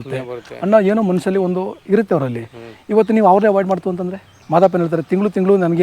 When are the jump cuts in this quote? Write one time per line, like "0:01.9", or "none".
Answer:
0:04.4